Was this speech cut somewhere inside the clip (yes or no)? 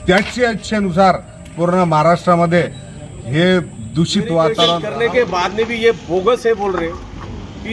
yes